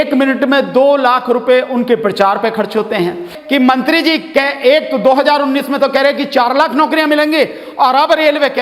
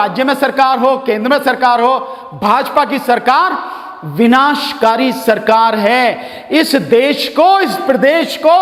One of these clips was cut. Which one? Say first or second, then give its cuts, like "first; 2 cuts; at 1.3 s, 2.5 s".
first; 1 cut; at 3.3 s